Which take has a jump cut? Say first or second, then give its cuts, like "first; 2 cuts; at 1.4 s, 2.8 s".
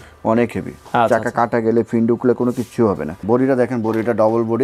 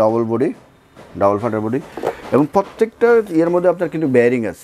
first; 1 cut; at 3.2 s